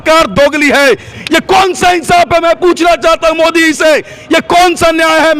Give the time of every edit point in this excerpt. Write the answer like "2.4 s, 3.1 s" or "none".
1.1 s